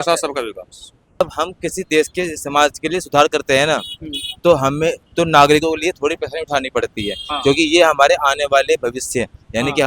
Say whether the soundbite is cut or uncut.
cut